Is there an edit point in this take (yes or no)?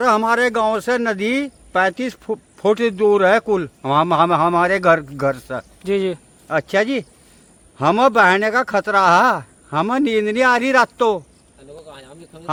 no